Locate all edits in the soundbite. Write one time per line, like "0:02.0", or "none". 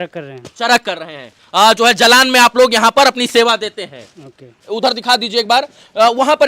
none